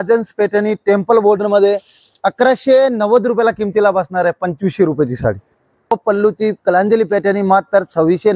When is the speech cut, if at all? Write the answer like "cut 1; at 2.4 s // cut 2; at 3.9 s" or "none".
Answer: cut 1; at 5.9 s